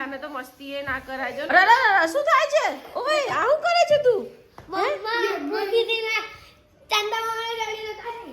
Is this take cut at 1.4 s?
yes; 1 cut; at 1.4 s

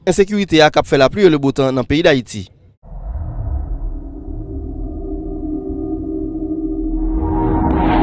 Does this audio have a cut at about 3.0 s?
yes; 1 cut; at 3.0 s

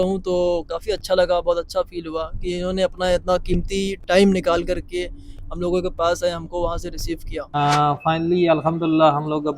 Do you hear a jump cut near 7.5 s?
yes; 1 cut; at 7.5 s

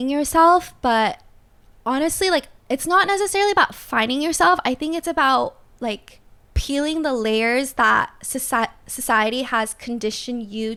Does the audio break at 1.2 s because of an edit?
no; 0 cuts

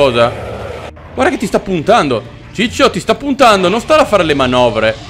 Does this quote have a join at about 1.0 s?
yes; 1 cut; at 1.0 s

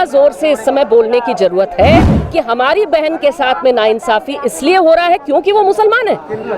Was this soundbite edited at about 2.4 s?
no; 0 cuts

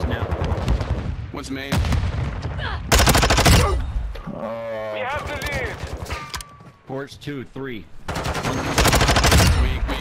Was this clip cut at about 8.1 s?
yes; 1 cut; at 8.1 s

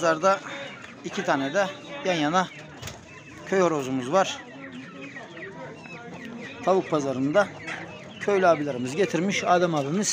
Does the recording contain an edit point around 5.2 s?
no; 0 cuts

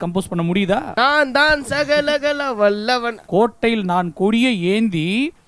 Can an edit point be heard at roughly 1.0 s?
yes; 2 cuts; at 1.0 s, 3.2 s

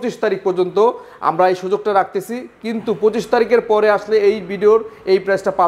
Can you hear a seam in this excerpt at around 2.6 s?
no; 0 cuts

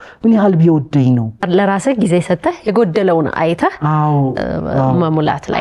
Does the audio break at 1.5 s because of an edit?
yes; 1 cut; at 1.5 s

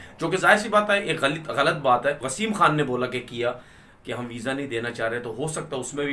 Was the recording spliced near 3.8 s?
no; 1 cut; at 2.3 s

